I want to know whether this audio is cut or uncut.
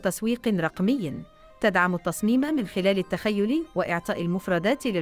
uncut